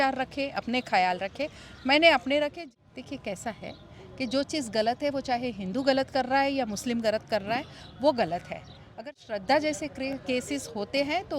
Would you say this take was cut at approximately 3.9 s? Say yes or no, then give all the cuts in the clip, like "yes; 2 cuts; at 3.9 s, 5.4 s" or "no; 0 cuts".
no; 1 cut; at 2.6 s